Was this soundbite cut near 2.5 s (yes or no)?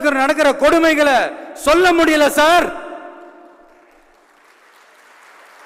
no